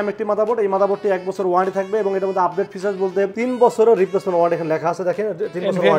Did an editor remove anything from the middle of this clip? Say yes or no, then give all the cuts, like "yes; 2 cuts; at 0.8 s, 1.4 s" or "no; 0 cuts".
yes; 1 cut; at 3.3 s